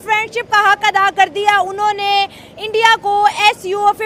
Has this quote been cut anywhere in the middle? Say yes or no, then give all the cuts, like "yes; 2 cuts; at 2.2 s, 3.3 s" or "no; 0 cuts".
no; 0 cuts